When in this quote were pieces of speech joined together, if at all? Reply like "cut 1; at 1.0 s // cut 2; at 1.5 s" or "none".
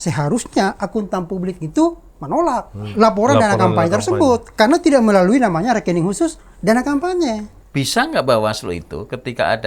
cut 1; at 7.5 s